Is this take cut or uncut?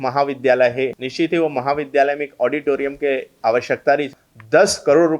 cut